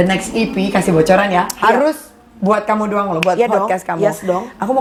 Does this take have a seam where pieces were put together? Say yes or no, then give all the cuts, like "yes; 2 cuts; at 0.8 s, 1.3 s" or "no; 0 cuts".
no; 0 cuts